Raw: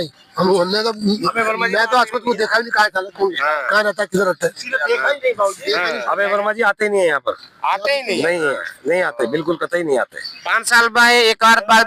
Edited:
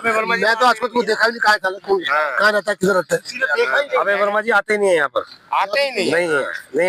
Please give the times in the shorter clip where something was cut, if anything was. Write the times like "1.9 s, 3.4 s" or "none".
4.0 s